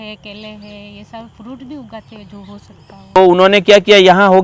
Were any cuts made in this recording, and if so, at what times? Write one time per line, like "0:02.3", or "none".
0:03.2